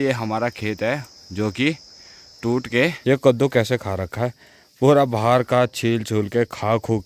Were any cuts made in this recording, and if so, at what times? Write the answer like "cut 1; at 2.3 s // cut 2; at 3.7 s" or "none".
cut 1; at 3.0 s